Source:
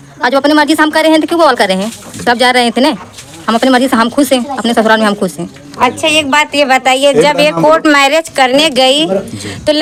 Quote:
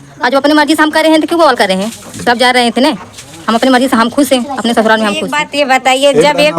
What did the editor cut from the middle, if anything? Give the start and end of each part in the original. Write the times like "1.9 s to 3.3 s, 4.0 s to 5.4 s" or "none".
5.3 s to 6.3 s